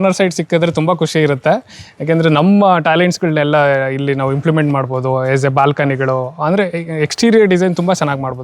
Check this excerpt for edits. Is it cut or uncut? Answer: uncut